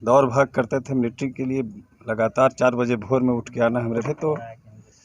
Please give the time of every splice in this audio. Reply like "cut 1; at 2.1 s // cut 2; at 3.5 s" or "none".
cut 1; at 4.1 s